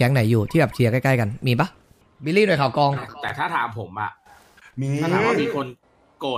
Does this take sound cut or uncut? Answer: cut